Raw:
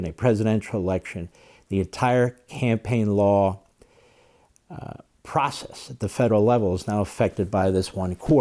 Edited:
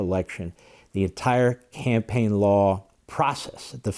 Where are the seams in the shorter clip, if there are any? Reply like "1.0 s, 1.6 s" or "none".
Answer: 3.0 s